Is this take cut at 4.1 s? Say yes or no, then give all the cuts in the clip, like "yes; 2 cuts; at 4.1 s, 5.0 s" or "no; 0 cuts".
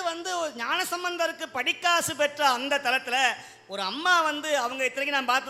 no; 0 cuts